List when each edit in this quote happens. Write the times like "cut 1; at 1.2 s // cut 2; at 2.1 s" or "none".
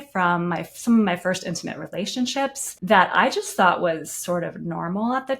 cut 1; at 2.7 s

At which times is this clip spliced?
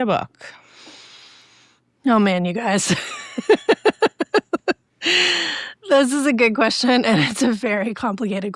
none

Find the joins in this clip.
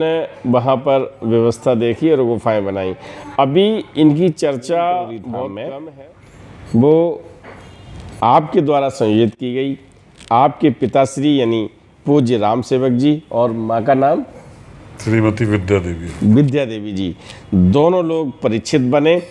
cut 1; at 5.7 s

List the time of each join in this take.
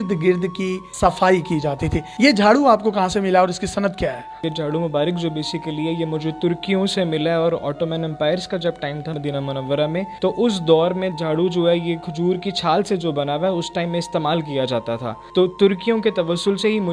none

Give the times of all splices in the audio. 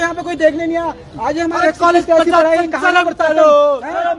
none

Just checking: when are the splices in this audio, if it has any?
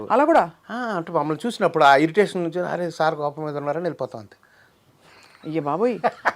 none

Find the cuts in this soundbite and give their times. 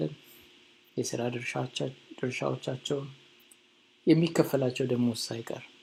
none

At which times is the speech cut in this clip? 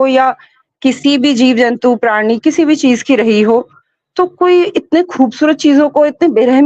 none

